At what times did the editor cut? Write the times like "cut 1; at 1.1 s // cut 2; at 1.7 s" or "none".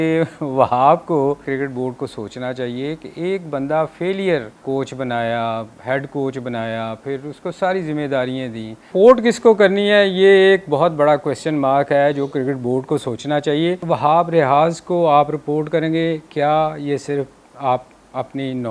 cut 1; at 1.4 s // cut 2; at 4.6 s // cut 3; at 8.9 s // cut 4; at 13.8 s